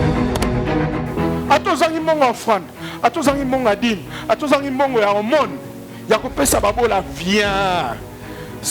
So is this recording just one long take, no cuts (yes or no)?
no